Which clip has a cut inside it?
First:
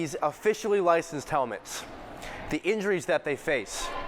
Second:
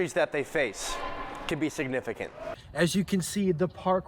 second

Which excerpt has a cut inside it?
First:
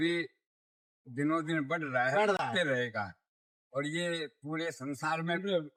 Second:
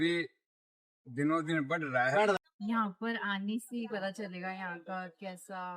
second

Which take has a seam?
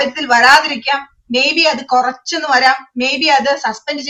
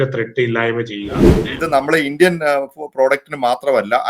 second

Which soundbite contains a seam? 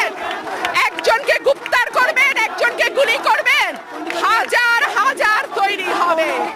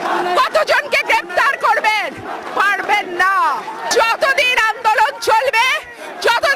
second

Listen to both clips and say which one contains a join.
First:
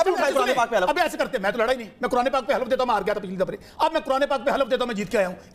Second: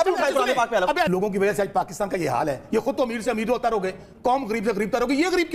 second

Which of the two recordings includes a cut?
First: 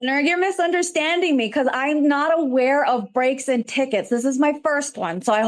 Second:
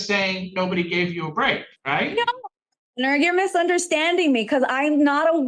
second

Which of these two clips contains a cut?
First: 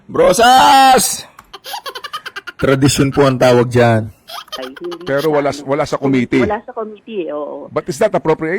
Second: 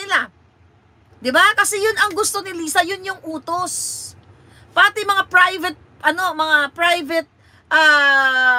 first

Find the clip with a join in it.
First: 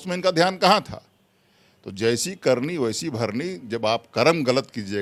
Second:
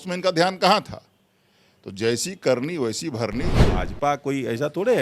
second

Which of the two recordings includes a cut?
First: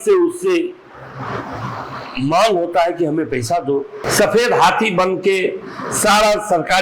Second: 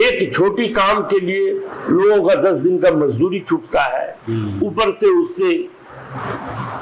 first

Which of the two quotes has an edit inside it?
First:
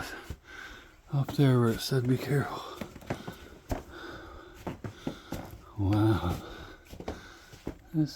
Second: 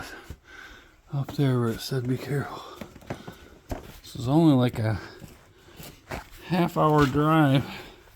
second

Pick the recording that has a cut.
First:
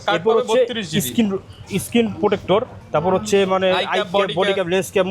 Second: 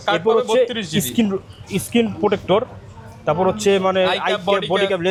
first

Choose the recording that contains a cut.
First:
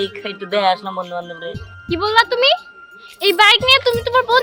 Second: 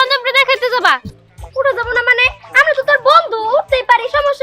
second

